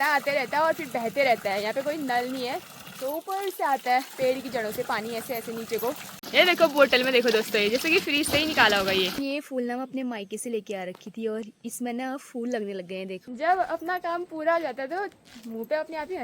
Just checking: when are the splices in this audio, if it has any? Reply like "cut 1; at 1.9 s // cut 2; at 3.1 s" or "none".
cut 1; at 6.1 s // cut 2; at 9.2 s // cut 3; at 13.2 s